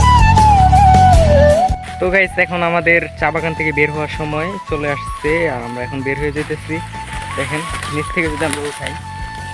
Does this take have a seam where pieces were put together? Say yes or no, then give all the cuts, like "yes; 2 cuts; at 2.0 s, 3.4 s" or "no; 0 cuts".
no; 0 cuts